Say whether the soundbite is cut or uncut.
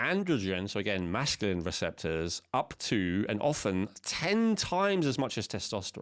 uncut